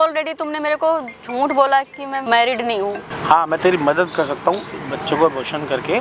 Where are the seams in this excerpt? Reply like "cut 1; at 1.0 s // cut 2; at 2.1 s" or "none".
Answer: cut 1; at 2.2 s // cut 2; at 3.0 s